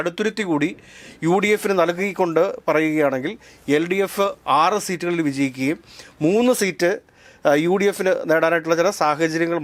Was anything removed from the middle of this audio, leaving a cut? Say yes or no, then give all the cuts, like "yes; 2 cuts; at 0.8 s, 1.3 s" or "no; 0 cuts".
no; 0 cuts